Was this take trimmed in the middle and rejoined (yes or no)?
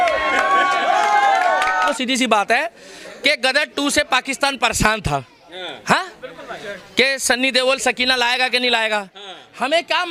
no